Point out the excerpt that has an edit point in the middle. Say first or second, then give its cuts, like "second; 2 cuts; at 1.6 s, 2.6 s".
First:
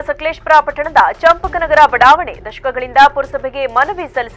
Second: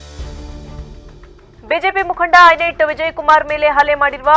second; 1 cut; at 1.4 s